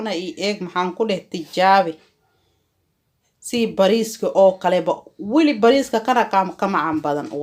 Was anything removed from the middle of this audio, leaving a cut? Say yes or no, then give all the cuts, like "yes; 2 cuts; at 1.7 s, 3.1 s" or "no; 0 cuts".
no; 0 cuts